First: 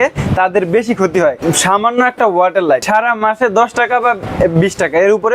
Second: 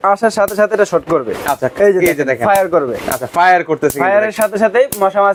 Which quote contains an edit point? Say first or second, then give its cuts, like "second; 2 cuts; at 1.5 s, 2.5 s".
first; 2 cuts; at 1.4 s, 2.8 s